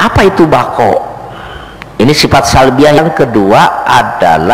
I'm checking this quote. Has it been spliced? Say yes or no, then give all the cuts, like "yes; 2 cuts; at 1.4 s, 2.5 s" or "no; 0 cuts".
yes; 1 cut; at 3.0 s